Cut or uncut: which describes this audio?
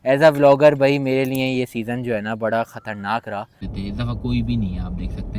cut